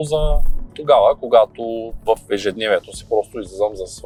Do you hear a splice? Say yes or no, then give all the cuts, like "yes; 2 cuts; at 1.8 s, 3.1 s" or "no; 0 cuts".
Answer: no; 0 cuts